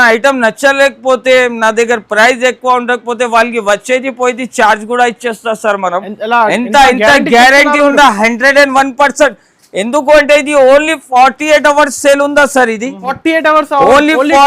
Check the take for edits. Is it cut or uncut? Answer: cut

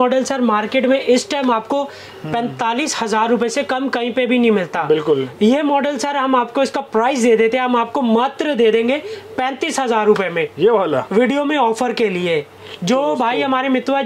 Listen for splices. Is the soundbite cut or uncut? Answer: uncut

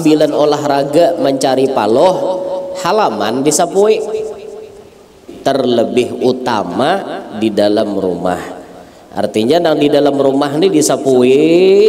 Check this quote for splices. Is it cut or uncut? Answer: cut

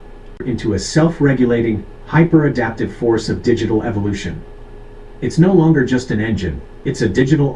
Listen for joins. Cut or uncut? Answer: uncut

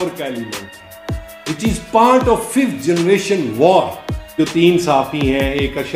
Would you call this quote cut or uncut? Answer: cut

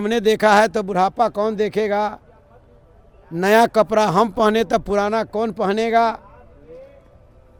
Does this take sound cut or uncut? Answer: uncut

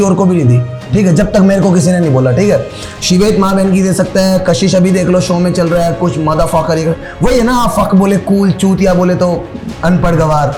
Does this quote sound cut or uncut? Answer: uncut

